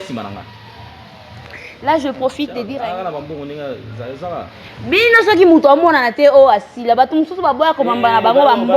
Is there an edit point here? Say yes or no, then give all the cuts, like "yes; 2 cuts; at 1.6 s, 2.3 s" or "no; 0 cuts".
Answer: yes; 1 cut; at 2.6 s